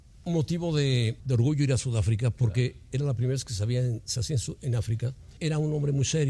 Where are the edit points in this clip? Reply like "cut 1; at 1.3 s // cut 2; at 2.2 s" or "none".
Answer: cut 1; at 1.2 s // cut 2; at 5.2 s